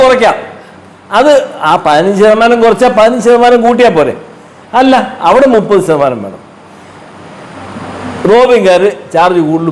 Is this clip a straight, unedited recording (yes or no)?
yes